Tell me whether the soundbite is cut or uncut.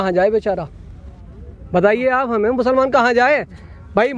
uncut